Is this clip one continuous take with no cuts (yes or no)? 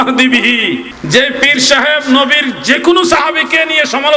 no